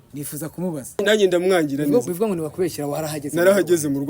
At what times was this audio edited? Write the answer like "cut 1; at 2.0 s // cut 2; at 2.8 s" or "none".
cut 1; at 1.0 s